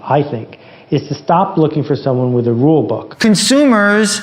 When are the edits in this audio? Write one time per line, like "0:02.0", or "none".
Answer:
0:03.1